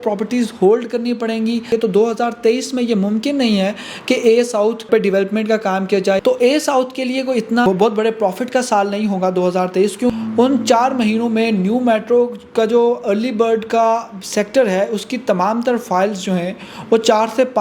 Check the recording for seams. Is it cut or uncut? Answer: cut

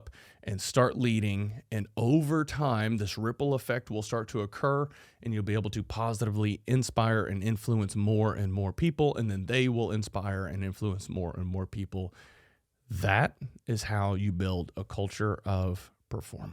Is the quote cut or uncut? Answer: uncut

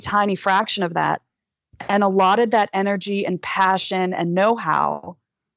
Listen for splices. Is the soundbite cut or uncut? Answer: uncut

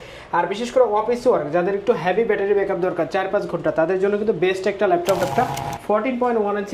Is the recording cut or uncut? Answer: cut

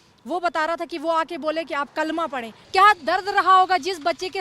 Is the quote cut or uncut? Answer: cut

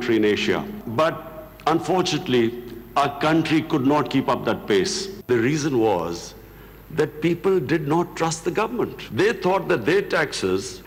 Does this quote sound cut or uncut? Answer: cut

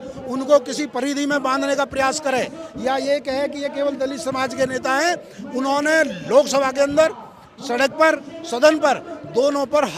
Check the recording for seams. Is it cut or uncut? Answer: uncut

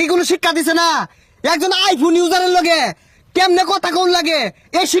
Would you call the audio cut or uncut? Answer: uncut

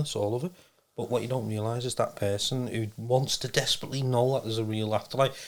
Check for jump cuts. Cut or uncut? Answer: uncut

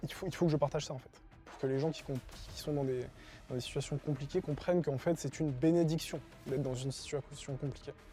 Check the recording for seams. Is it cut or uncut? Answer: uncut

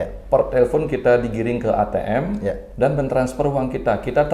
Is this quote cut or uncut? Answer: uncut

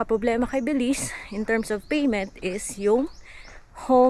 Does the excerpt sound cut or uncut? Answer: uncut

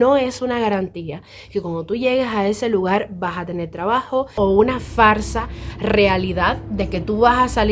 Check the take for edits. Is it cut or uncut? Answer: cut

